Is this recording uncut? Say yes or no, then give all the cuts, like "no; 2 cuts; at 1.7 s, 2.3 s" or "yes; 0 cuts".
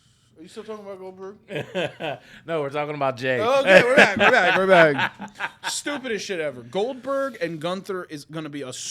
yes; 0 cuts